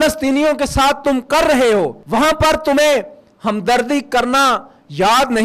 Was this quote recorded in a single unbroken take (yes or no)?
no